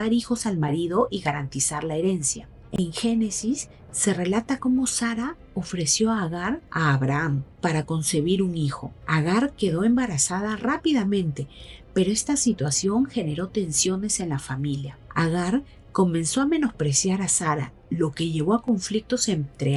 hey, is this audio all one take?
yes; 0 cuts

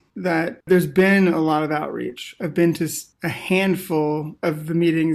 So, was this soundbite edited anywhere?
no; 0 cuts

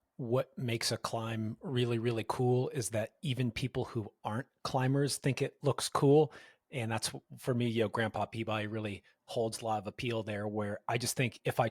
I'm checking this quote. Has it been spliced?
no; 0 cuts

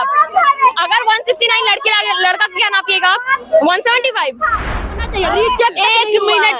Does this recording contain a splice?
yes; 1 cut; at 4.8 s

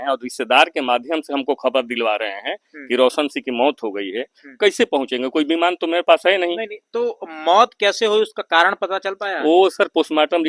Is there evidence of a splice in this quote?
no; 0 cuts

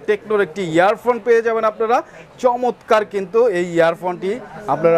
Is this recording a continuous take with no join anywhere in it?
yes; 0 cuts

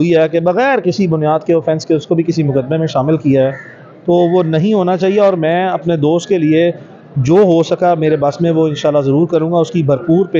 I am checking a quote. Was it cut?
no; 0 cuts

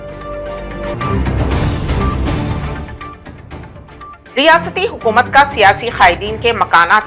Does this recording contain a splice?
yes; 1 cut; at 0.9 s

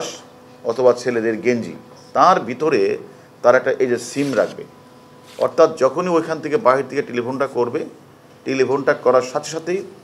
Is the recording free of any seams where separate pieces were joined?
yes; 0 cuts

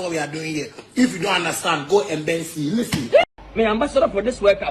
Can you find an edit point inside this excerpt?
yes; 1 cut; at 3.4 s

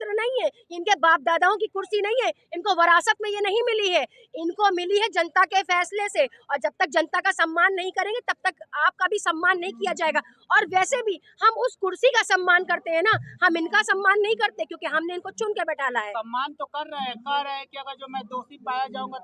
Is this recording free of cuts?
yes; 0 cuts

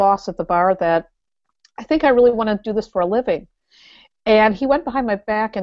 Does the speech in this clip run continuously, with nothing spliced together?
yes; 0 cuts

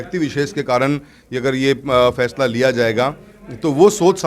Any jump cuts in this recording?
no; 0 cuts

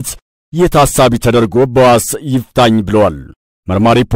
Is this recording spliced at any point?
no; 0 cuts

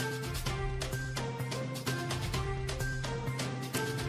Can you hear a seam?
yes; 1 cut; at 1.3 s

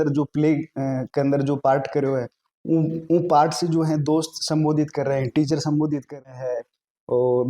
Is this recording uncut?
no; 1 cut; at 6.3 s

